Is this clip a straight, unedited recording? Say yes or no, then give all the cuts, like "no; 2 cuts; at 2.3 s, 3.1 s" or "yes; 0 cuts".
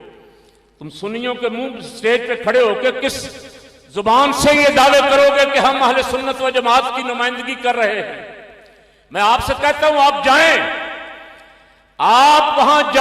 yes; 0 cuts